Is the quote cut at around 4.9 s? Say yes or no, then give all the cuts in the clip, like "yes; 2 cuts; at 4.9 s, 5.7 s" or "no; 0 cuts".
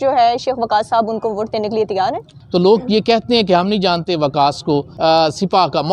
yes; 2 cuts; at 2.3 s, 4.9 s